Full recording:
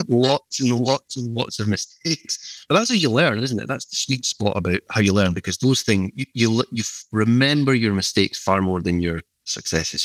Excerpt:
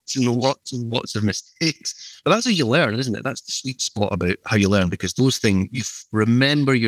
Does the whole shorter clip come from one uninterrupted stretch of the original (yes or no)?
no